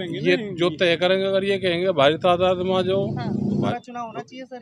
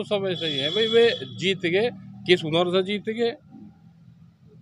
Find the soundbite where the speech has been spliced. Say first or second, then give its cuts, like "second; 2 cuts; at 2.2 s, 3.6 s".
first; 1 cut; at 3.7 s